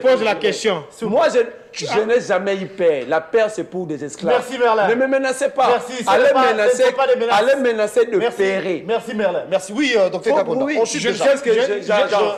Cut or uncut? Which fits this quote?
uncut